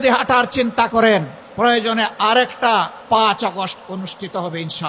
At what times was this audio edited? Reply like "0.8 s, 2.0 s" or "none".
1.4 s, 3.0 s